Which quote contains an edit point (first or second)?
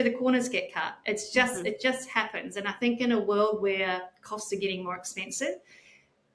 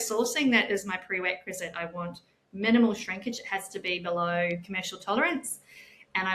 second